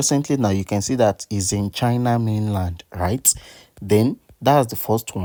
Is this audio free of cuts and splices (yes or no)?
yes